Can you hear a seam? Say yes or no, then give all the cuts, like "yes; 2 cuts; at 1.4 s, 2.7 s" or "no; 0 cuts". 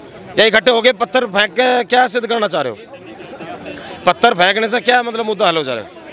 no; 0 cuts